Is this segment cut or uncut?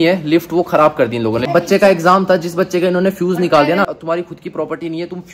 cut